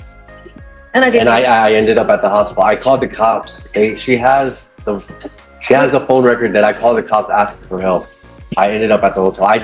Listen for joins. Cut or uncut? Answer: cut